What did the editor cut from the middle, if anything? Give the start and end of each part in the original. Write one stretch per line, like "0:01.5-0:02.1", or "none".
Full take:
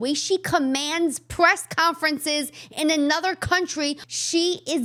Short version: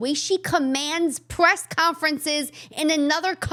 none